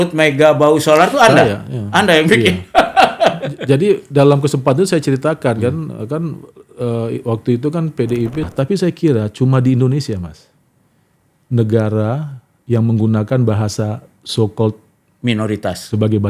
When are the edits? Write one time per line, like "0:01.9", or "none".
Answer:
0:08.5